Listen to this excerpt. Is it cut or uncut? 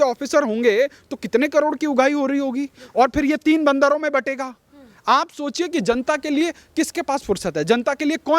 uncut